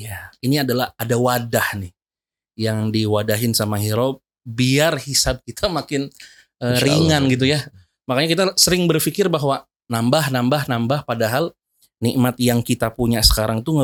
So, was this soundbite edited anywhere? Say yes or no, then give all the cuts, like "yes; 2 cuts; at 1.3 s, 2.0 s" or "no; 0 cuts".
no; 0 cuts